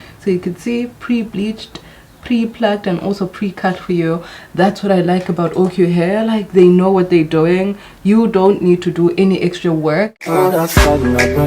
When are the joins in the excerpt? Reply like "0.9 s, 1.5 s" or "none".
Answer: 10.1 s